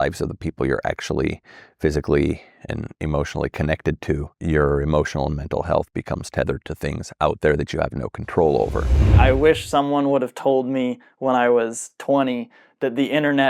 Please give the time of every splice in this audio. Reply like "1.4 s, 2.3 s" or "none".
4.4 s, 9.1 s